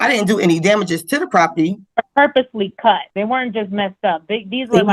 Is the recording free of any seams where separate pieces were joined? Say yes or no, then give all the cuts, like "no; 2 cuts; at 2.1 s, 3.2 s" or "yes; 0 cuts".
no; 2 cuts; at 1.8 s, 3.1 s